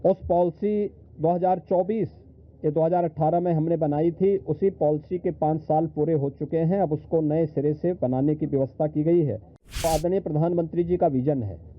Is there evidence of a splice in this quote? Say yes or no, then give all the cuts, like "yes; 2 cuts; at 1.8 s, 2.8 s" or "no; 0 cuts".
yes; 1 cut; at 9.8 s